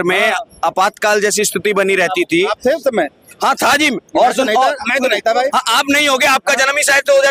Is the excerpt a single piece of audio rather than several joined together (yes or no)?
yes